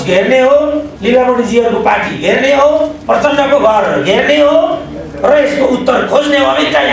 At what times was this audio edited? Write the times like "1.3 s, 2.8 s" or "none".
0.9 s, 3.0 s